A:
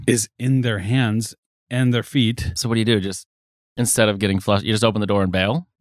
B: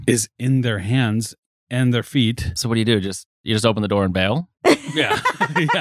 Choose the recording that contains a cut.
B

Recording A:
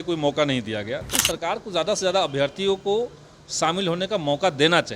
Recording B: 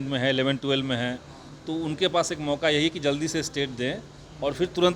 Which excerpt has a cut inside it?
A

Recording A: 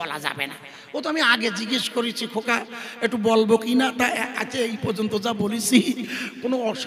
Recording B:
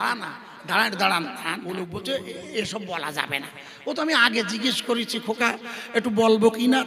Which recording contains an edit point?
B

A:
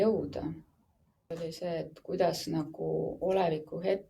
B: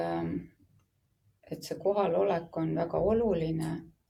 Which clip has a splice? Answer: A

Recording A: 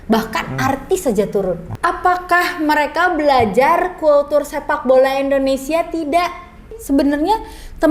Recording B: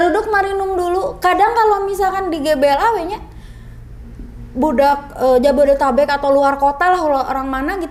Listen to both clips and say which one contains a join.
A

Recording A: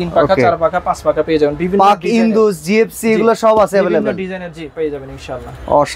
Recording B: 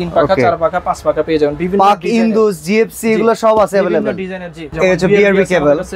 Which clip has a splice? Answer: B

